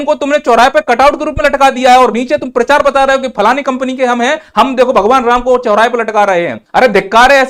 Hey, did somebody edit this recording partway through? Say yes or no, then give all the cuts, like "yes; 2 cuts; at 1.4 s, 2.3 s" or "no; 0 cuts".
yes; 1 cut; at 6.6 s